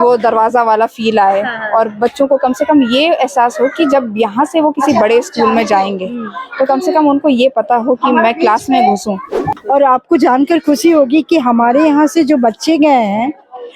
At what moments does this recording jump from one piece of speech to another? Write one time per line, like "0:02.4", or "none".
0:09.5